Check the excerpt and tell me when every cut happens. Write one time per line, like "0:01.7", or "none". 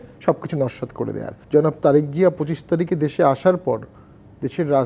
0:01.3